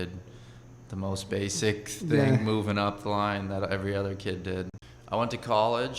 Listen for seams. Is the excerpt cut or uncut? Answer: cut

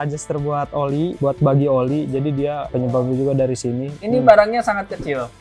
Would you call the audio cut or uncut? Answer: cut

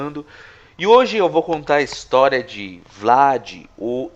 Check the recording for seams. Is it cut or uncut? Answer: uncut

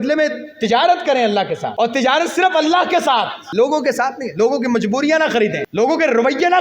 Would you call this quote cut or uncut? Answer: cut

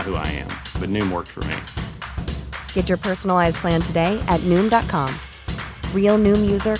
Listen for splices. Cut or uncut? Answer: uncut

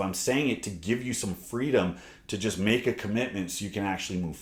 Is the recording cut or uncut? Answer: uncut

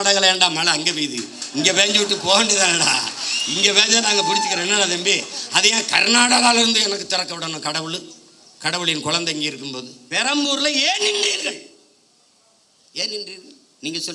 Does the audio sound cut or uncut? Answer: cut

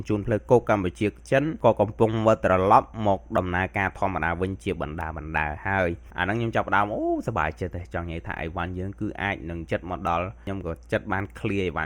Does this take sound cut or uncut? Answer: cut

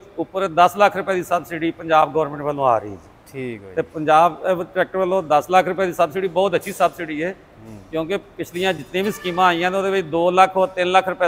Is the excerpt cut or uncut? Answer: uncut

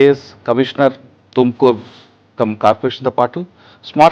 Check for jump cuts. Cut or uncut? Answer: uncut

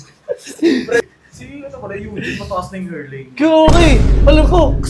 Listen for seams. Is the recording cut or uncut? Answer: cut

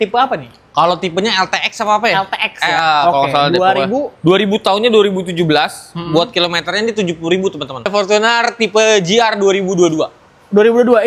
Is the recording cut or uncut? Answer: cut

